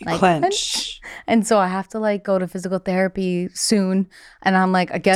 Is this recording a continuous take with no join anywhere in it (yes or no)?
yes